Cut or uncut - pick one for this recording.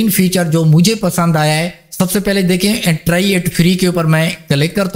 cut